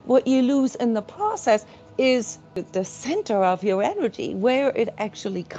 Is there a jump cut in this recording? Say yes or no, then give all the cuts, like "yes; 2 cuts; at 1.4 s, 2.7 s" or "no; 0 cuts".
yes; 1 cut; at 2.7 s